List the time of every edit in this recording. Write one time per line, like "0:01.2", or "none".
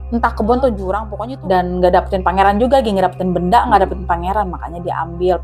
0:01.1